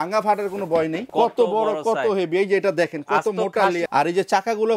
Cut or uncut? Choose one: cut